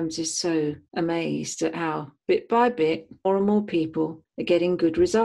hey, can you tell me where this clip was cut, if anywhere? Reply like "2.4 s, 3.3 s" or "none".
0.8 s, 3.2 s, 4.3 s